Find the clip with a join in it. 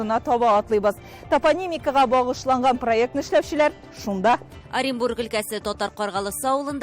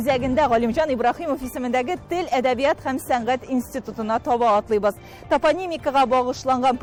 first; 1 cut; at 4.6 s

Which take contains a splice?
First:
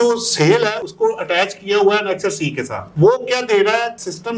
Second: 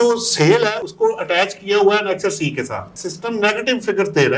second; 1 cut; at 2.9 s

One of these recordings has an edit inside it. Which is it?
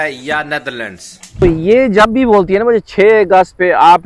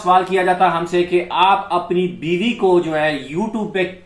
first; 1 cut; at 1.4 s

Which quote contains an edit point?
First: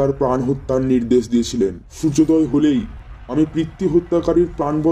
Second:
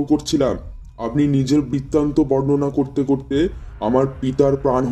first; 1 cut; at 1.9 s

